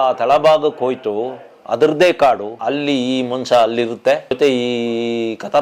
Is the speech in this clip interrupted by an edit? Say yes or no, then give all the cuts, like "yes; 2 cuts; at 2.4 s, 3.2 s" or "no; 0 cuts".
yes; 2 cuts; at 2.5 s, 4.4 s